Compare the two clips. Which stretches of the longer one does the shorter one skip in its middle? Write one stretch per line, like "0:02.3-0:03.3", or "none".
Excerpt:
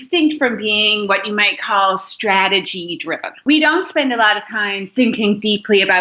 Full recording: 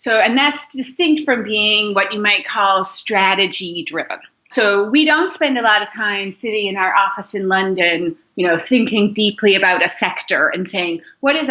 0:04.3-0:04.9
0:06.3-0:08.6